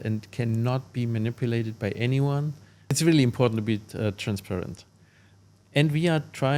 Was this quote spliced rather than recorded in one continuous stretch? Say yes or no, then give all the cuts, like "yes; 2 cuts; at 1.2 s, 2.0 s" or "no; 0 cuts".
yes; 2 cuts; at 3.0 s, 5.3 s